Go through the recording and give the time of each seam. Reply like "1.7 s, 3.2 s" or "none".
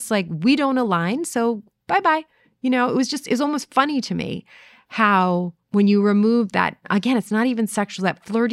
5.6 s, 6.9 s